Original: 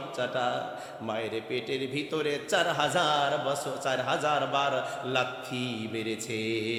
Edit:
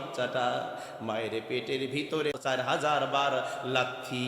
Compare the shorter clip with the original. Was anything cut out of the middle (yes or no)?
yes